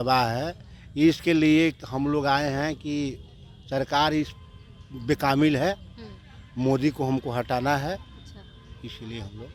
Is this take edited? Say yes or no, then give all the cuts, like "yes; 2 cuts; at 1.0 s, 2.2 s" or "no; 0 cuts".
no; 0 cuts